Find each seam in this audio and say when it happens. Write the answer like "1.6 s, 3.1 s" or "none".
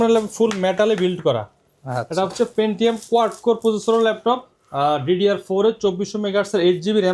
none